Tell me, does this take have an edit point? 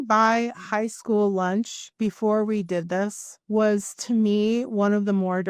yes; 2 cuts; at 1.8 s, 3.3 s

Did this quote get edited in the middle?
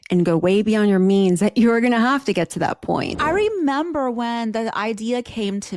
yes; 1 cut; at 3.2 s

